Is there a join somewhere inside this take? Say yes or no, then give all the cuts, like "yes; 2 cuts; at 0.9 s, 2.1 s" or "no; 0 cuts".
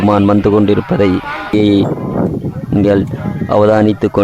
yes; 1 cut; at 1.5 s